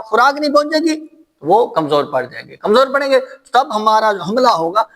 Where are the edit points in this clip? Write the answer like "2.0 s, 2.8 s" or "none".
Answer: none